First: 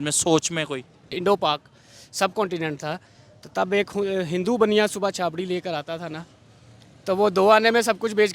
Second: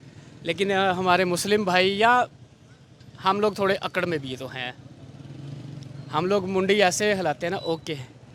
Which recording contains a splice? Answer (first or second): first